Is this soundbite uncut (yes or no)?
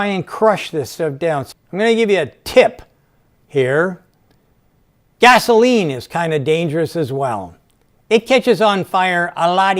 no